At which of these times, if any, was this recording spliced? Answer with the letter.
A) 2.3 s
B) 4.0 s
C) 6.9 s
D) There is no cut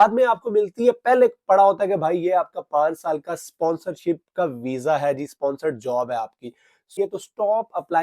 C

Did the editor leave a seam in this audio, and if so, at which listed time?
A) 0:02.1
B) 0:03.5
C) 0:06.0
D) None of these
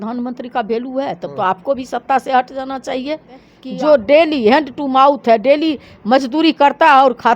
B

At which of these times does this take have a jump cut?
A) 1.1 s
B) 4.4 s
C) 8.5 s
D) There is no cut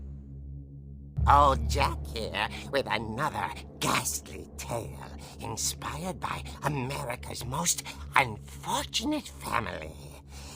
A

